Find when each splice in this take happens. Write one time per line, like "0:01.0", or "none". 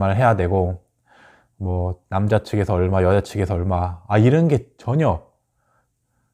none